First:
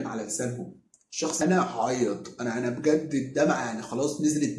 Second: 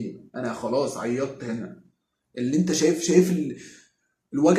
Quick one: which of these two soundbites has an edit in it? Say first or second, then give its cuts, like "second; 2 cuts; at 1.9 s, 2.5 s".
first; 1 cut; at 1.4 s